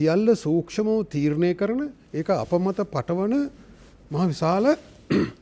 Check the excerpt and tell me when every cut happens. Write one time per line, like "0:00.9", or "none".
none